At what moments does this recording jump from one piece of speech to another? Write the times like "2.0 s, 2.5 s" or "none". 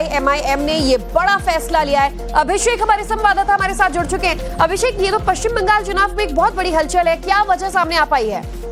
none